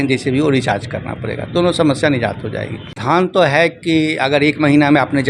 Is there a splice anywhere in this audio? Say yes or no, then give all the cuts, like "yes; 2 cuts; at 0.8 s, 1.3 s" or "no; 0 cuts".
yes; 1 cut; at 3.0 s